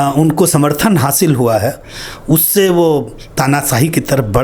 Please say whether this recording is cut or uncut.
uncut